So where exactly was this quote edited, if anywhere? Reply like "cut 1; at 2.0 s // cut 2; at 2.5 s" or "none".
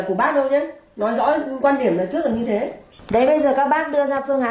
cut 1; at 2.9 s